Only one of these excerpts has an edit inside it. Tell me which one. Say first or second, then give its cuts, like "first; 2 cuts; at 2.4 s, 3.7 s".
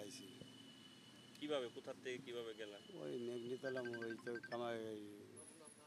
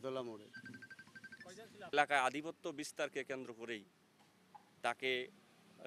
second; 1 cut; at 1.9 s